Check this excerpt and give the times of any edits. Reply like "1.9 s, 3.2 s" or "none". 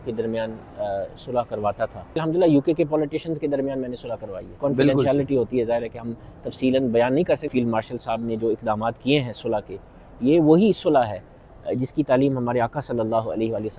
2.2 s, 4.5 s, 7.4 s